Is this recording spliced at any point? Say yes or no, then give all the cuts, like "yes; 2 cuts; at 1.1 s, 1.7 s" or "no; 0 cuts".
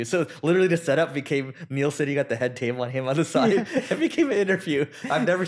no; 0 cuts